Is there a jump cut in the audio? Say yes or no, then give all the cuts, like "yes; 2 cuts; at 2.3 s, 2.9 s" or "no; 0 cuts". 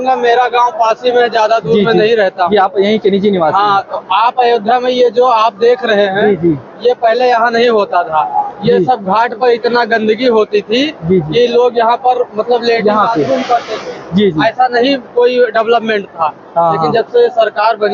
no; 0 cuts